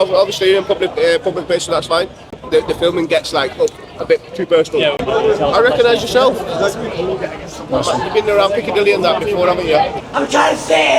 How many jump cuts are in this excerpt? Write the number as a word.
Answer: three